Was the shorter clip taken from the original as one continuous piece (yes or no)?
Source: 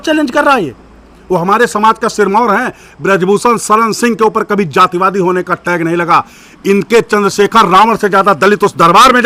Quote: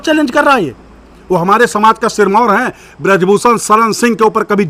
yes